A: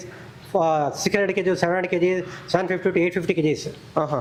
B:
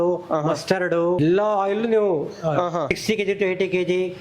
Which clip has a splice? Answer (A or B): B